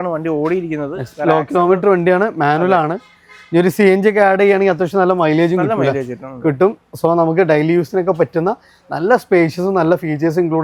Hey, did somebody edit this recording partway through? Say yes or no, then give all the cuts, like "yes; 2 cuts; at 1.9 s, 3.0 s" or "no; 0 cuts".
no; 0 cuts